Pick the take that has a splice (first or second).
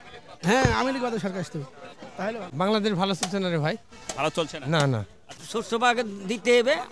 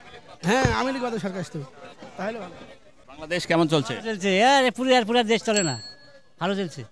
first